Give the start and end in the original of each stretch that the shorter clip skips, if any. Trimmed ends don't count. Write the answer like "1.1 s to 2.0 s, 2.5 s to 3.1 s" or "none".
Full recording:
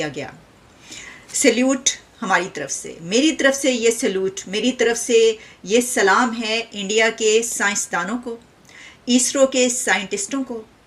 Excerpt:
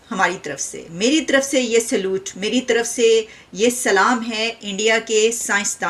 none